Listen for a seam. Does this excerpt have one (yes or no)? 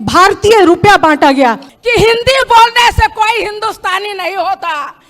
yes